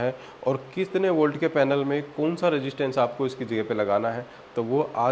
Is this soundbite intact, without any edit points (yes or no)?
yes